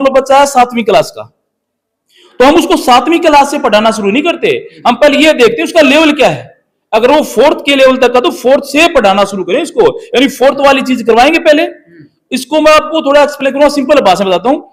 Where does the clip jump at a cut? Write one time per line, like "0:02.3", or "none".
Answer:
none